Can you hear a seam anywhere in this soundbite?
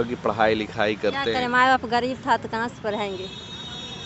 no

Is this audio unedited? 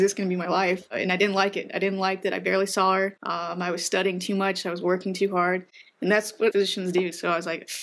no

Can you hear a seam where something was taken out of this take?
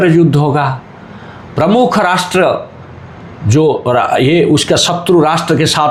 no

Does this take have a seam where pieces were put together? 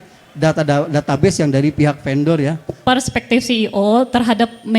yes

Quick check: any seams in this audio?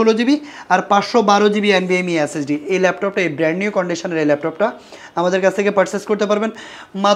no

